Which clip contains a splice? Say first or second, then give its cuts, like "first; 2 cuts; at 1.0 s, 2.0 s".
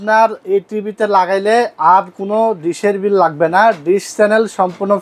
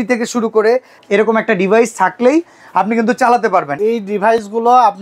second; 2 cuts; at 0.9 s, 3.7 s